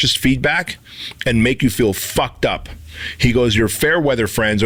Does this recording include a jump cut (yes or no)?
no